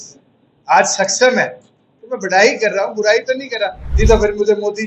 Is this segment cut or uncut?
cut